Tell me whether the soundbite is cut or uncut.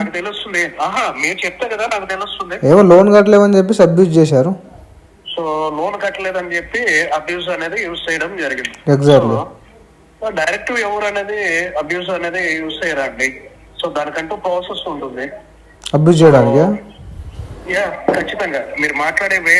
uncut